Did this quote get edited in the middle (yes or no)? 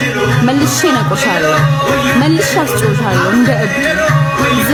no